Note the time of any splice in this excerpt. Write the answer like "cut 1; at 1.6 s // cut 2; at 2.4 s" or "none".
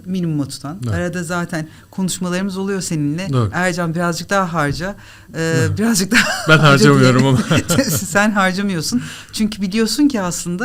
none